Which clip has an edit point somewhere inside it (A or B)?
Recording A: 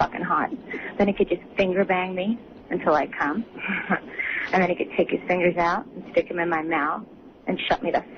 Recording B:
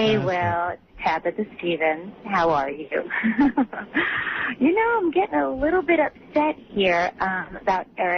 A